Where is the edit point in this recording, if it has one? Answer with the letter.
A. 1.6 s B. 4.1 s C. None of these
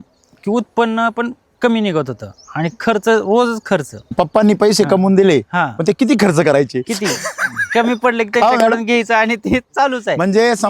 B